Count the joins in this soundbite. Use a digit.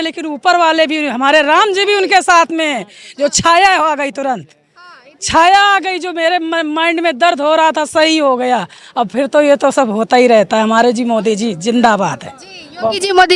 0